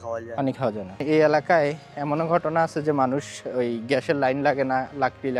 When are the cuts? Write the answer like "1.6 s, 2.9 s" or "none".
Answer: 1.0 s